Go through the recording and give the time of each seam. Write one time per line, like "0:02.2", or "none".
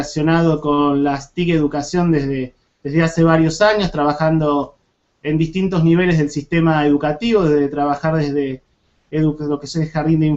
0:01.7

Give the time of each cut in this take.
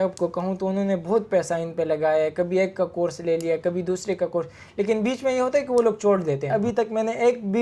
0:06.5

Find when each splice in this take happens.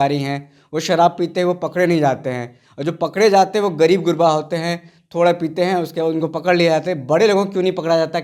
none

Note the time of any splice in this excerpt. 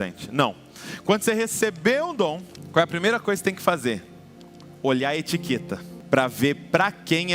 0:02.5
0:05.9

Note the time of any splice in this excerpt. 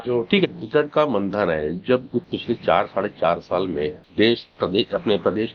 0:02.3
0:04.0

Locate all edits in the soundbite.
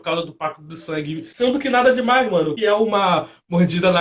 0:01.2
0:02.5

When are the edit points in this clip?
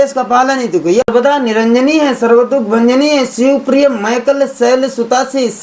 0:01.1

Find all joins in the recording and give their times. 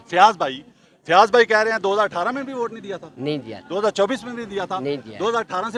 none

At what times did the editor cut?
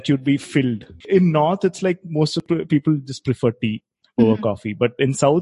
0:00.9
0:02.4

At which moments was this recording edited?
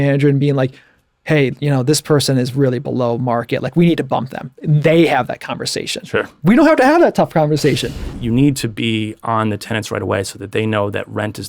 0:08.1

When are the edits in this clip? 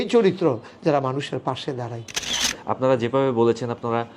0:02.2

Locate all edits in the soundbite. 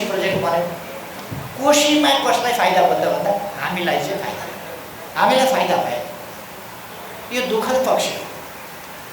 0:05.0

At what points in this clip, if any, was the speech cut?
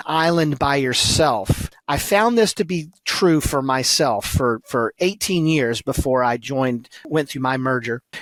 none

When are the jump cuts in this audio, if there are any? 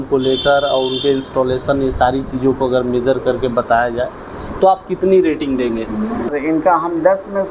0:06.3

